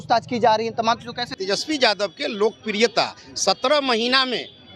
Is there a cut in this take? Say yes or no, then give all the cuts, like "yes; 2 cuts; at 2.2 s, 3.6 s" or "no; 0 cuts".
yes; 1 cut; at 1.3 s